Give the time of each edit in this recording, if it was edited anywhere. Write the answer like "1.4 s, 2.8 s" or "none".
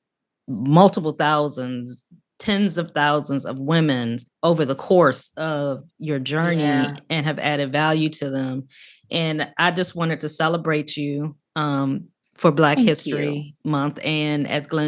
none